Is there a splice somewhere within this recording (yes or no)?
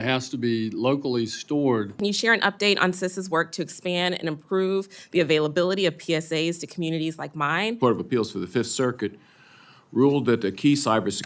yes